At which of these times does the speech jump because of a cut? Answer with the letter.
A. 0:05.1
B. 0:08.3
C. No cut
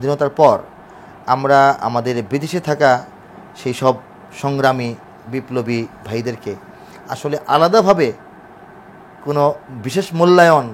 C